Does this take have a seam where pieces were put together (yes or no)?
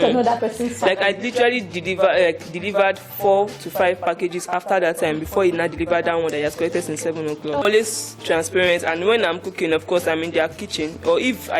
yes